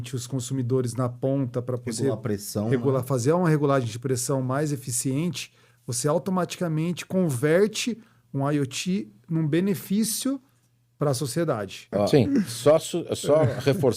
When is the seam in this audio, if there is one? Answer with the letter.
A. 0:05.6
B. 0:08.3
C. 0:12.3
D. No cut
C